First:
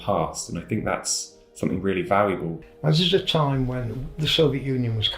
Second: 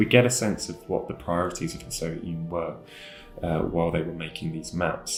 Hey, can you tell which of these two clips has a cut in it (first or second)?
first